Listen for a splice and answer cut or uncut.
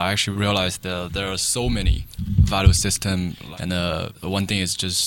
cut